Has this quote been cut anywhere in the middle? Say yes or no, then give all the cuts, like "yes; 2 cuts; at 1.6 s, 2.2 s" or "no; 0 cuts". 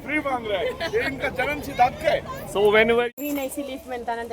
yes; 1 cut; at 3.1 s